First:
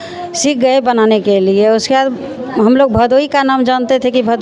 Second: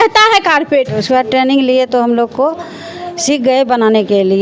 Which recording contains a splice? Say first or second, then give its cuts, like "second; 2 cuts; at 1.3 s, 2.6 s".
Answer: second; 1 cut; at 1.0 s